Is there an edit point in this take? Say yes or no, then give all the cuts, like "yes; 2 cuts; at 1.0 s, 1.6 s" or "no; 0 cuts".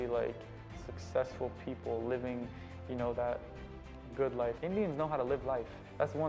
yes; 1 cut; at 4.6 s